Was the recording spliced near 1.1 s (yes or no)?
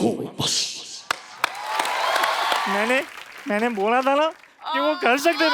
no